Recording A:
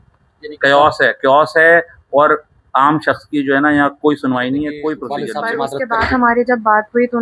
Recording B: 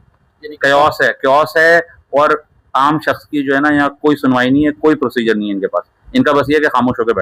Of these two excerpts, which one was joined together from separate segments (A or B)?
A